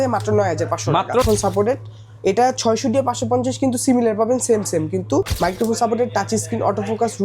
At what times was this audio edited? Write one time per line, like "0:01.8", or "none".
0:01.2
0:05.3